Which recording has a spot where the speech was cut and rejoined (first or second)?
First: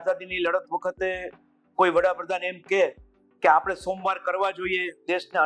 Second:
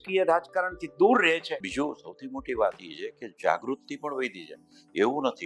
second